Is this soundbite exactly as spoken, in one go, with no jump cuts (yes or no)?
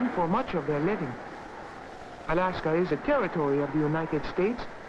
no